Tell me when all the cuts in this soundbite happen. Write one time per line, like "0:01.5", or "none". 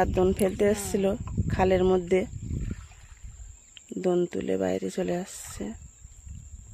none